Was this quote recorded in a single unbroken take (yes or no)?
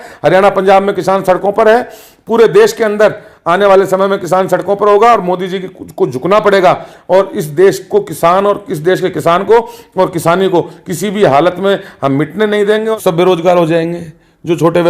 no